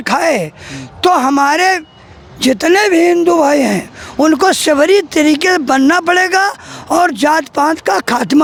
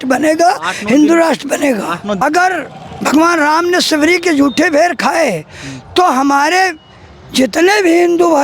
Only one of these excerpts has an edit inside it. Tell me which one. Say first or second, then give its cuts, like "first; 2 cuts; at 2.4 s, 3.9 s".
second; 1 cut; at 2.2 s